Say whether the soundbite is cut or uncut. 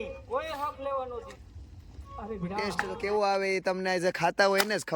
cut